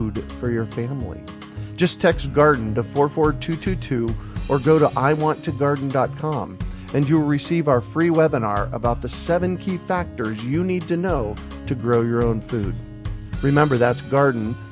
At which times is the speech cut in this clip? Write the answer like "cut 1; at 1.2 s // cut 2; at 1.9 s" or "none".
none